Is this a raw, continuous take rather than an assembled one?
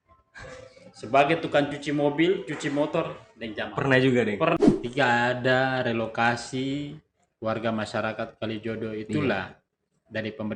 no; 1 cut; at 4.6 s

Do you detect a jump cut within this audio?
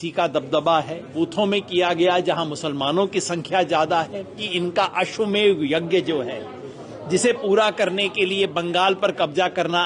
no; 0 cuts

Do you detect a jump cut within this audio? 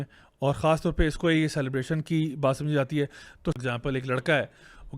yes; 1 cut; at 3.4 s

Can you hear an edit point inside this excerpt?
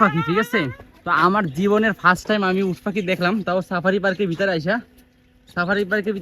no; 0 cuts

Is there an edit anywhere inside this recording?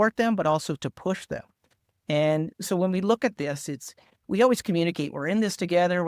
no; 0 cuts

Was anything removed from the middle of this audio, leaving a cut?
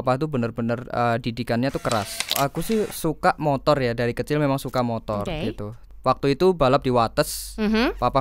yes; 2 cuts; at 2.4 s, 5.8 s

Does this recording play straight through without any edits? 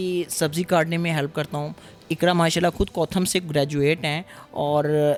yes; 0 cuts

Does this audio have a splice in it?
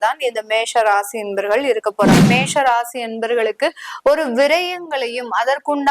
yes; 1 cut; at 2.2 s

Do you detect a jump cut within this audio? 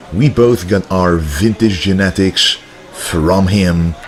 no; 0 cuts

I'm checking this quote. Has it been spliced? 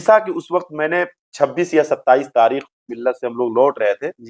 yes; 1 cut; at 2.9 s

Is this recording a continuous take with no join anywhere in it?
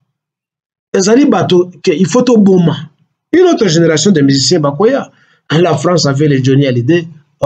yes; 0 cuts

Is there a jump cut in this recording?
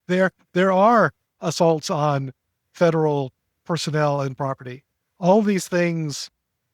no; 0 cuts

